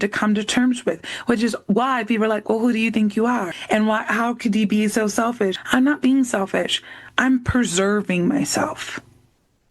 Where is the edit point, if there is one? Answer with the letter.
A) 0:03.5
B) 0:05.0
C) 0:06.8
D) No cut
A